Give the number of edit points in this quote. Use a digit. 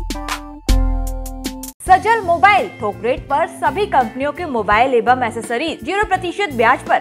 2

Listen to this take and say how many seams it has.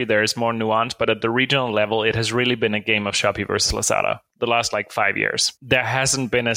1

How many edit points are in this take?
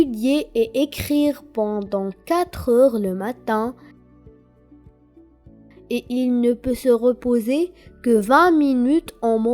2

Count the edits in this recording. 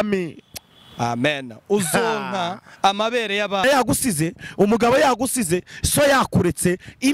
1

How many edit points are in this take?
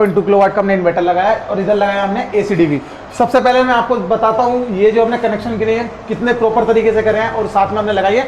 0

